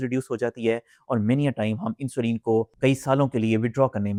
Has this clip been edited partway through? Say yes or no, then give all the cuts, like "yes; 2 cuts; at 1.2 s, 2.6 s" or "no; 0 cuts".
no; 0 cuts